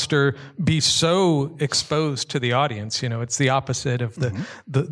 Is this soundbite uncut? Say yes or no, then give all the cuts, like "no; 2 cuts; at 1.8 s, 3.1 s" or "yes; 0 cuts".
yes; 0 cuts